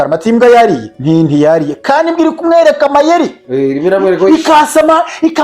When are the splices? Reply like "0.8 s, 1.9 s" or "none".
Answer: 0.9 s